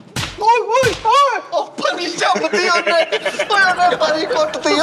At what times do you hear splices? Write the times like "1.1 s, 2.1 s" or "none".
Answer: none